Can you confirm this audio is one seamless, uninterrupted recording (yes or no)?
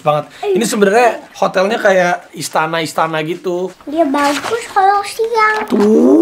no